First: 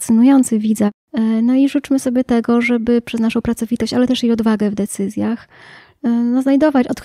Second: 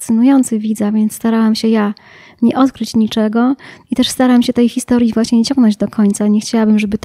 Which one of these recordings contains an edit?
first; 1 cut; at 0.9 s

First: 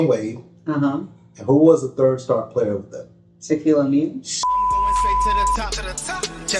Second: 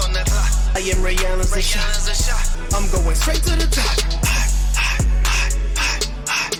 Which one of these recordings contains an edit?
first; 1 cut; at 5.1 s

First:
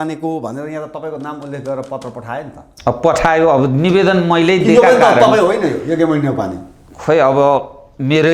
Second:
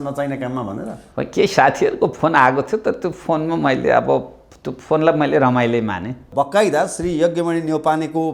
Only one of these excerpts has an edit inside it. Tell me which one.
second; 1 cut; at 6.2 s

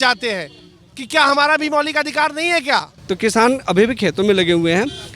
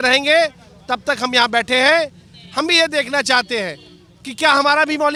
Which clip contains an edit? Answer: first; 1 cut; at 2.9 s

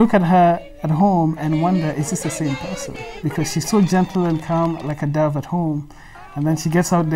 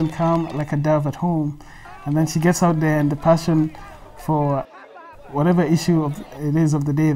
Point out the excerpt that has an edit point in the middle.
second; 1 cut; at 4.7 s

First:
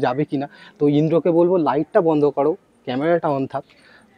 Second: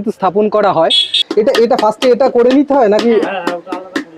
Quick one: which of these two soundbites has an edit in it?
second; 1 cut; at 1.2 s

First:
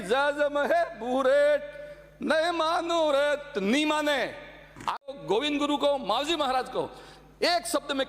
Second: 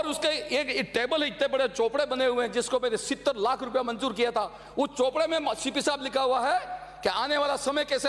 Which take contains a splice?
first; 1 cut; at 5.1 s

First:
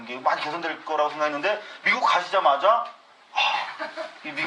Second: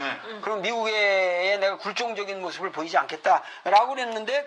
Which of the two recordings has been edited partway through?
second; 1 cut; at 3.5 s

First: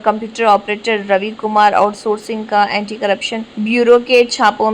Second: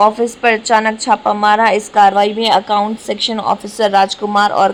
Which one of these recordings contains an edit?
first; 1 cut; at 3.5 s

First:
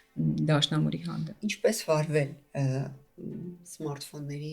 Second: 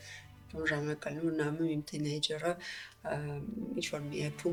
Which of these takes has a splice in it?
first; 1 cut; at 1.4 s

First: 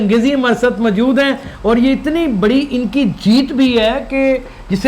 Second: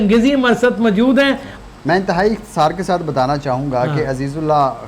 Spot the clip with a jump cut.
second; 1 cut; at 1.5 s

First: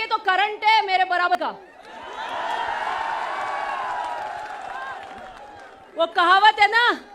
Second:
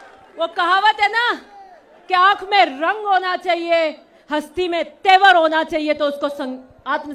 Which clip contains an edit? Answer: first; 1 cut; at 1.3 s

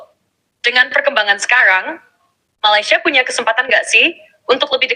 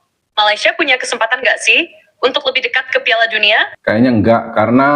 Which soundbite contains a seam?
second; 1 cut; at 3.7 s

